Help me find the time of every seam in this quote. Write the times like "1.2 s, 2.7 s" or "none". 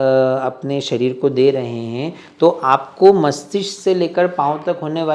none